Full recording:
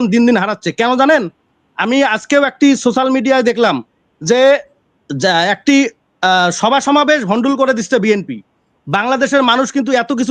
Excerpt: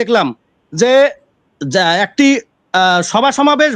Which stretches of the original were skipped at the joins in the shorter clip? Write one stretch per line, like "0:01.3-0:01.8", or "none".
none

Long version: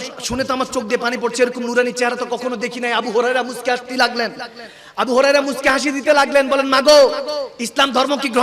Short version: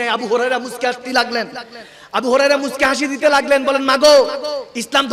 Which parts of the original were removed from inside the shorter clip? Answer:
none

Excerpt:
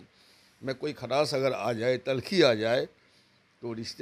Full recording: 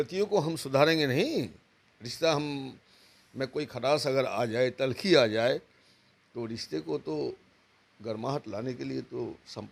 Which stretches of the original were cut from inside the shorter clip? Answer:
none

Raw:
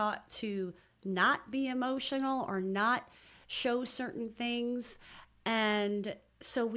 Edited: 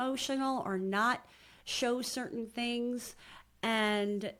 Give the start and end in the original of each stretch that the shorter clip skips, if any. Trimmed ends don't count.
none

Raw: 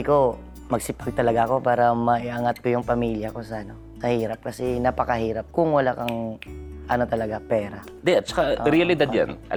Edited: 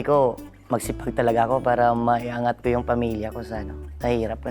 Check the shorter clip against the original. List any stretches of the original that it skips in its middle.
none

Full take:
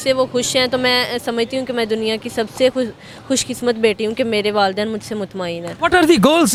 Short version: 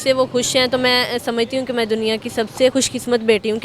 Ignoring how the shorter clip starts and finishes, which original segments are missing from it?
0:02.7-0:03.3

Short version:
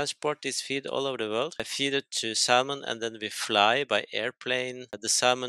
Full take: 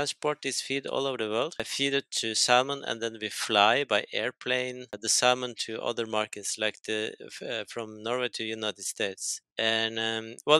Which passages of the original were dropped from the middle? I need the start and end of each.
none

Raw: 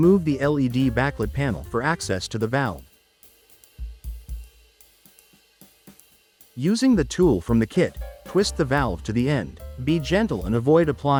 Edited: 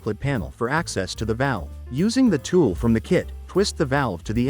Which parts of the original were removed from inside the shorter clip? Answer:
0:02.9-0:06.4
0:08.0-0:08.2

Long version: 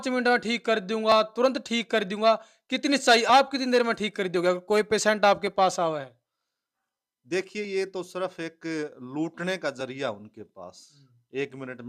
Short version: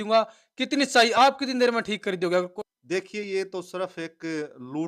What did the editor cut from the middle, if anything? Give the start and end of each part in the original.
0:04.6-0:06.9

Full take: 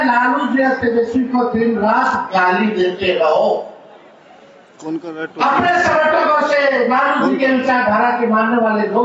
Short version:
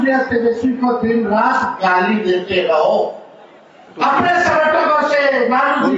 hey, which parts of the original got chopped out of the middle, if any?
0:04.3-0:05.2

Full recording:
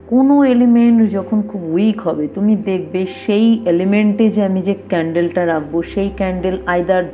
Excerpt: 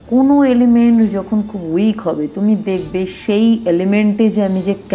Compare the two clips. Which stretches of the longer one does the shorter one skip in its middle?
none

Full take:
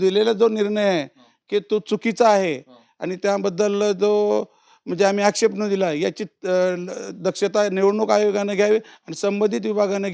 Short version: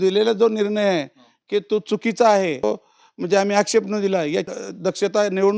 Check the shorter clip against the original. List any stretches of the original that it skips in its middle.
0:02.6-0:04.3
0:06.3-0:07.0

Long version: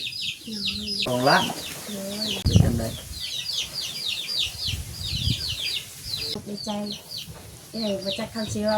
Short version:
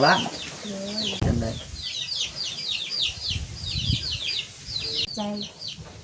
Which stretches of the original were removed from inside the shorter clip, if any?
0:02.5-0:02.6
0:06.4-0:06.5

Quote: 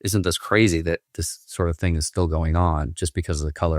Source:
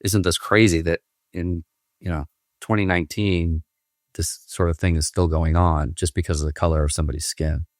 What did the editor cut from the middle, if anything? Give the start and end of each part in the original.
0:01.2-0:04.2

